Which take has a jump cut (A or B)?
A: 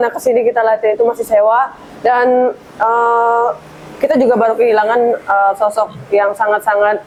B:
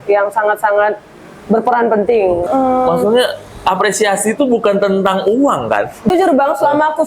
B